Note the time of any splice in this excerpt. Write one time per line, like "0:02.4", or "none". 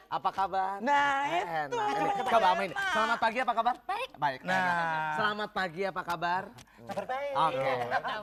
none